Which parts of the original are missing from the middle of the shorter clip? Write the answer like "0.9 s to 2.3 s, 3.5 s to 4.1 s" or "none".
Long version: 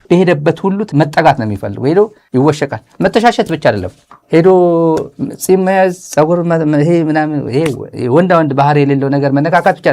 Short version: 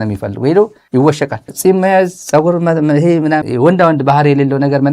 2.8 s to 5.3 s, 7.3 s to 8.0 s

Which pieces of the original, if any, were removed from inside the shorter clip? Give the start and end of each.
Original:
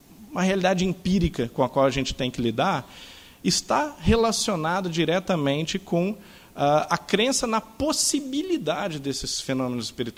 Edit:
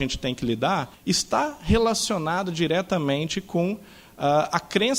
2.9 s to 3.3 s

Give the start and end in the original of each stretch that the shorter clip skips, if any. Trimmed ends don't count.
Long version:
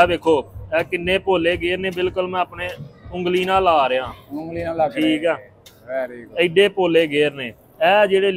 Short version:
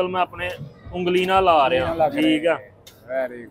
4.1 s to 4.7 s

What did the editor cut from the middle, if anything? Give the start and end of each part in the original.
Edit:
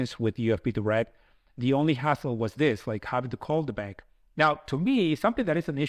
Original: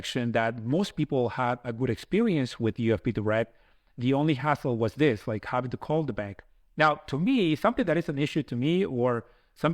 none

